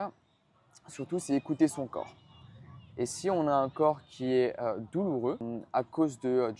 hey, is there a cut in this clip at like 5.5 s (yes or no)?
yes